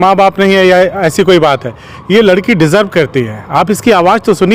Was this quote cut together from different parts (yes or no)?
no